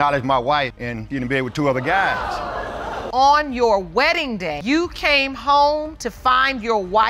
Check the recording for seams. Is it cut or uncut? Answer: uncut